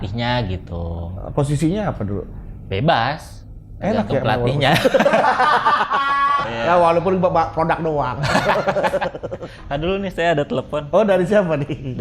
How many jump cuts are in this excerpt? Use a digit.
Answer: 1